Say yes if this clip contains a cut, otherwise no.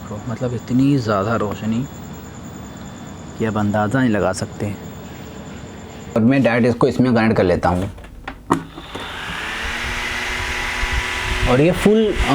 yes